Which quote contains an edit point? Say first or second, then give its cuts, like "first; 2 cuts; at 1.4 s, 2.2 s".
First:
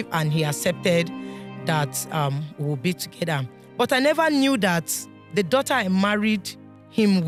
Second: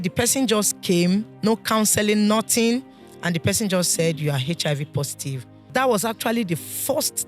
second; 1 cut; at 5.7 s